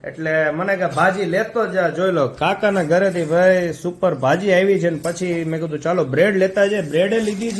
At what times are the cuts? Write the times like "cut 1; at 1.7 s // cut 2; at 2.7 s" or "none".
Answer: none